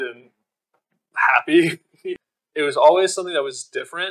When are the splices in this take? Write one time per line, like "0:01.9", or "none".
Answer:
0:02.1